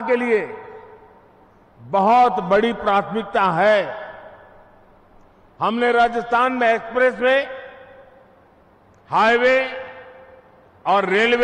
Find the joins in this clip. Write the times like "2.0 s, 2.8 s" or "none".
none